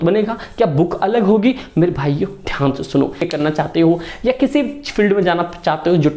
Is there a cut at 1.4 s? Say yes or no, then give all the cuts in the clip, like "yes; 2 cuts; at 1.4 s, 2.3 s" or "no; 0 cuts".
no; 1 cut; at 3.3 s